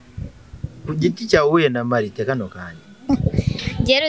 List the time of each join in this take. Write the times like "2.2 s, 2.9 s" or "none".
3.0 s